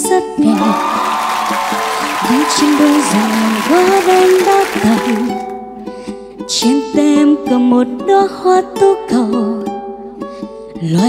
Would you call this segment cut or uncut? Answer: cut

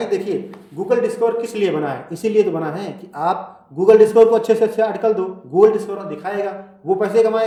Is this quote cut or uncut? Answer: uncut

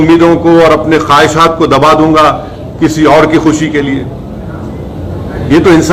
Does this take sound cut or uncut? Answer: uncut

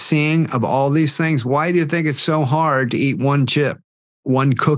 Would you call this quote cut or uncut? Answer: uncut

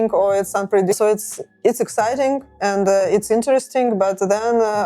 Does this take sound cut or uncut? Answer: cut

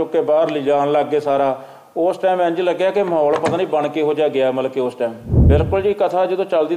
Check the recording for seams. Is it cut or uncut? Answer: cut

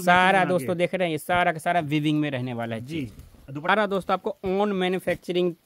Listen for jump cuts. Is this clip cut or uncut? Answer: cut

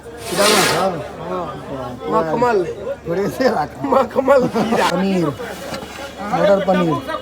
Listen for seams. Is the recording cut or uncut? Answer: cut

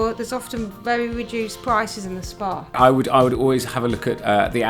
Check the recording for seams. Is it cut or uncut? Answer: cut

